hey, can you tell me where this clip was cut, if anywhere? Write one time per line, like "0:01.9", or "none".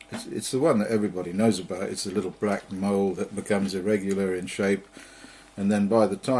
0:04.5